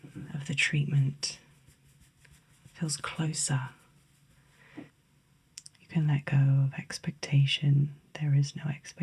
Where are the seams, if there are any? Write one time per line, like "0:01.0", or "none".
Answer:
0:05.0